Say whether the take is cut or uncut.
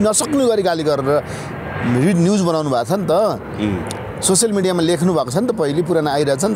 uncut